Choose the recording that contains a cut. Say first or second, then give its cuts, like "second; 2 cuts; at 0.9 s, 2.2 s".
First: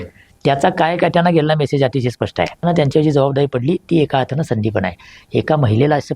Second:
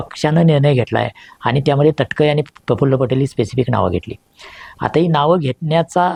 first; 1 cut; at 2.6 s